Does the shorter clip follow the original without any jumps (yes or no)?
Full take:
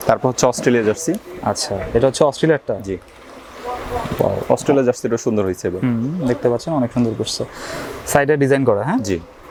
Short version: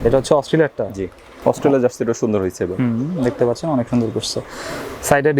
no